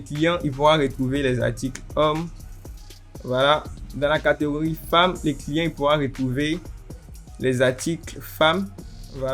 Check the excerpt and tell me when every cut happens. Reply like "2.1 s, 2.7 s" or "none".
none